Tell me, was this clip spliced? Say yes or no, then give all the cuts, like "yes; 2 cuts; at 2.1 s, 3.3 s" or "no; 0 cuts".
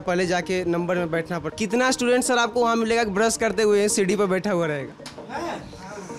yes; 1 cut; at 1.5 s